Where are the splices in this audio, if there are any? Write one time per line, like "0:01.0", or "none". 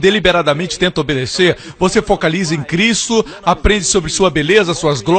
none

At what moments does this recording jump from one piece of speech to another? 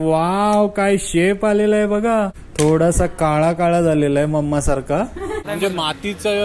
0:02.4
0:05.4

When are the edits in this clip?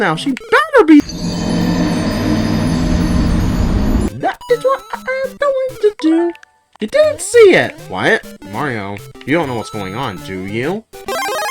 0:04.2

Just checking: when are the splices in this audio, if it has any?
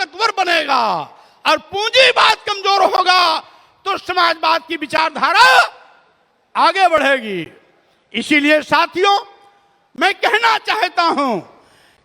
none

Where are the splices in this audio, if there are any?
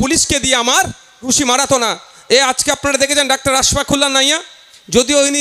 0:01.3

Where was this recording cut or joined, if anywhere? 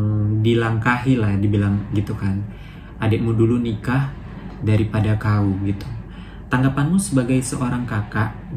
none

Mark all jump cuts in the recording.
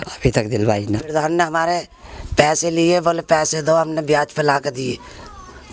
0:01.1

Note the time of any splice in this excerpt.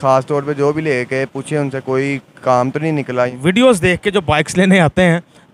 0:03.3

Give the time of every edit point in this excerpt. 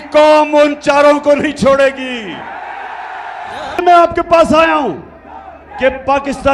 0:03.8

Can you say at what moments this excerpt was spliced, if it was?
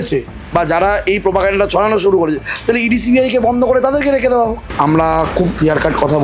0:04.6

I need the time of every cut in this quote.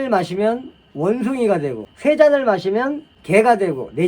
0:01.9
0:03.1

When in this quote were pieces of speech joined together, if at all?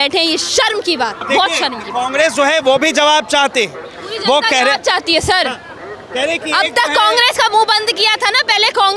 none

